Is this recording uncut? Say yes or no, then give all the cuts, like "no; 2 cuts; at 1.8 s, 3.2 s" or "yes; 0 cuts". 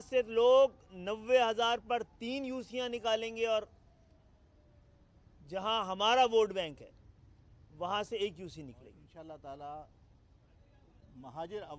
no; 1 cut; at 9.0 s